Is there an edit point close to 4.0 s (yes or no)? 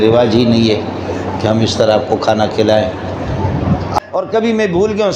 yes